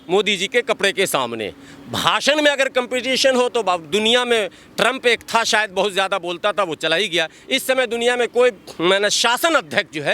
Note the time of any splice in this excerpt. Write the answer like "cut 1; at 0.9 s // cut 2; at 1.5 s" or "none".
none